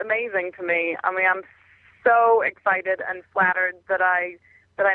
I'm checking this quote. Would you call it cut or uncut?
uncut